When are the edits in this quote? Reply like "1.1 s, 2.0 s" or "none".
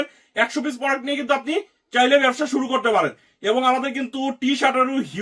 none